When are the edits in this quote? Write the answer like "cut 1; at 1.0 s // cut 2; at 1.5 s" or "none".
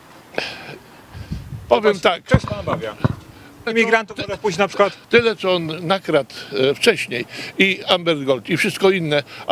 cut 1; at 3.7 s